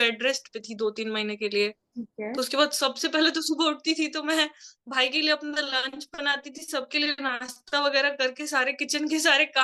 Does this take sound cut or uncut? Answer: uncut